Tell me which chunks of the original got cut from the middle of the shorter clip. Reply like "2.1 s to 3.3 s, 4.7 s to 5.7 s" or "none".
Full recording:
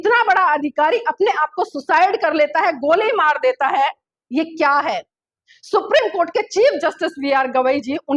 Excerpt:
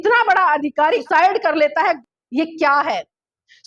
1.0 s to 1.8 s, 2.8 s to 4.0 s